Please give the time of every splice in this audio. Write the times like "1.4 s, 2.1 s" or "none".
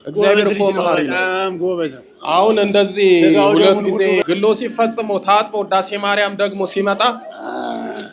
4.2 s